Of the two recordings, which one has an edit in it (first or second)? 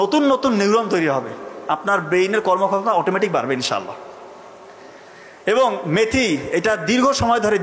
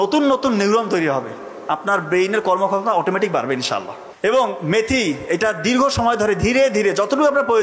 second